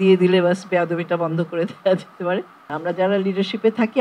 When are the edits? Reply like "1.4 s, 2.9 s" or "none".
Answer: 2.7 s